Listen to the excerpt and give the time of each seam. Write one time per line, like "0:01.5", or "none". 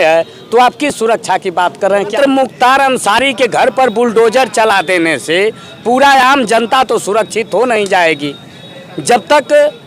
0:02.1